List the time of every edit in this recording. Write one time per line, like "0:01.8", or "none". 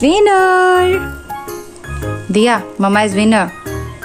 none